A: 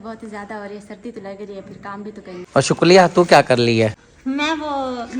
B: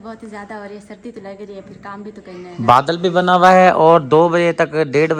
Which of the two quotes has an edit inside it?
A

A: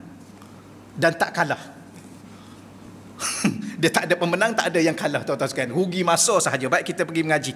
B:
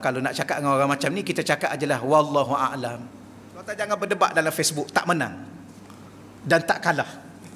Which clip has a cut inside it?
B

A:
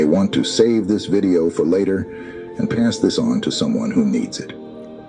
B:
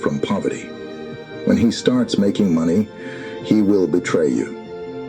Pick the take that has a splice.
B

